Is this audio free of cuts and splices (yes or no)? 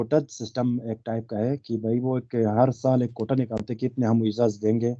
yes